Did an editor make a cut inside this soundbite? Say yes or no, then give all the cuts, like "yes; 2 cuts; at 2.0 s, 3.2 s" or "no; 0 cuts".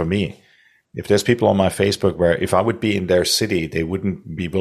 no; 0 cuts